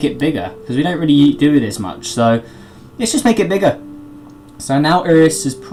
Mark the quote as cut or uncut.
uncut